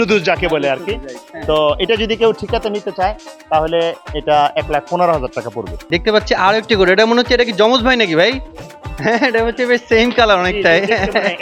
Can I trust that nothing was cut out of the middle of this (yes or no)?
yes